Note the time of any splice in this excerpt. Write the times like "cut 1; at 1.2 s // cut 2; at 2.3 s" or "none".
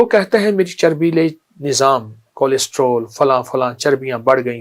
none

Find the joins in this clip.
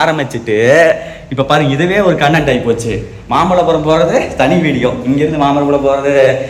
none

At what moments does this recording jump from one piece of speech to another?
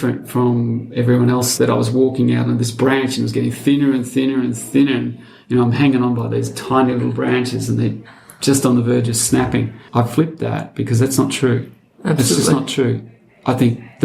cut 1; at 1.5 s // cut 2; at 9.8 s

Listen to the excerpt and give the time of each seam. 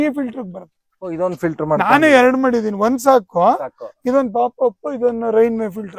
none

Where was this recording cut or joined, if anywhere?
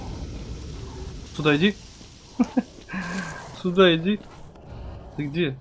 cut 1; at 1.3 s

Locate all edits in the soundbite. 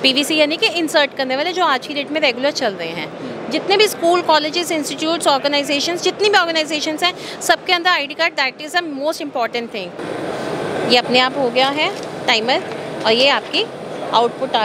cut 1; at 10.0 s

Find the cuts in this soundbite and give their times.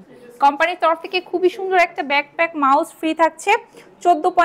none

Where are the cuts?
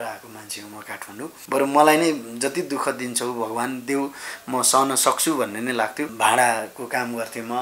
cut 1; at 1.4 s // cut 2; at 6.1 s

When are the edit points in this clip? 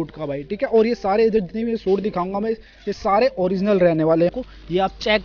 cut 1; at 4.3 s

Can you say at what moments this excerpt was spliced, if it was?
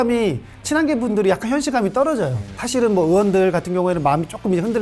cut 1; at 2.6 s

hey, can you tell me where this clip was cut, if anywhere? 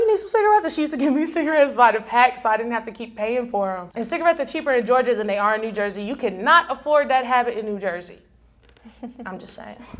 cut 1; at 3.9 s

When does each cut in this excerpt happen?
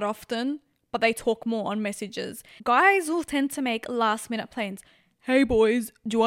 cut 1; at 2.4 s

